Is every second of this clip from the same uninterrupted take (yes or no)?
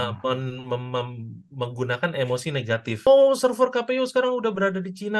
no